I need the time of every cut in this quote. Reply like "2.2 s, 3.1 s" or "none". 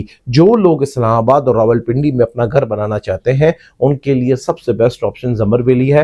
none